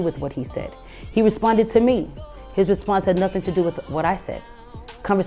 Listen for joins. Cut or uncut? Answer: uncut